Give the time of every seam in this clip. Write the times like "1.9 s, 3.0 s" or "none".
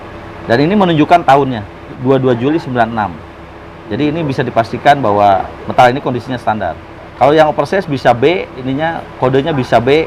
2.0 s, 5.5 s, 8.6 s